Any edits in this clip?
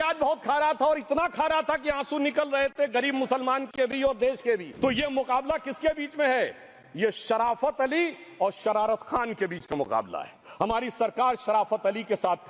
yes; 1 cut; at 4.7 s

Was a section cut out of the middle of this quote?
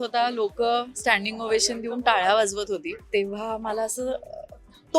yes; 1 cut; at 3.0 s

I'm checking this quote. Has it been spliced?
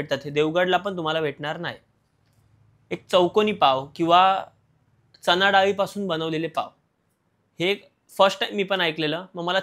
no; 0 cuts

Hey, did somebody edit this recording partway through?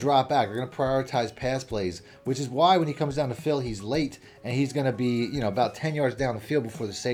no; 0 cuts

